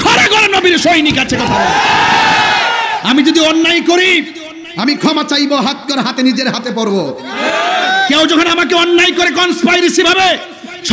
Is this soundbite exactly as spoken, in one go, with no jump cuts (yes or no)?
no